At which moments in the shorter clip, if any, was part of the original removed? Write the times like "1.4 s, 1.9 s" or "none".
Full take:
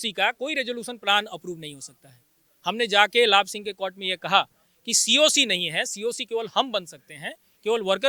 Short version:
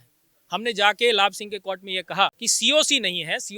2.5 s